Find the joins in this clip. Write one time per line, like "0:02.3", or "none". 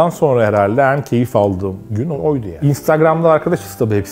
0:02.0